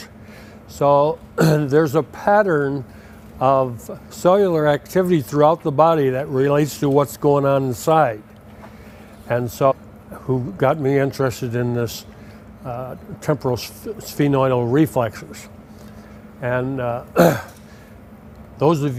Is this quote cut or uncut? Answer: uncut